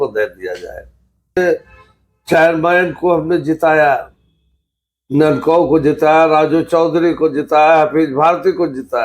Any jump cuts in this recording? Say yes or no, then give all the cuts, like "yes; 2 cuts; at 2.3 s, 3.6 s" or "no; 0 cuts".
yes; 1 cut; at 1.4 s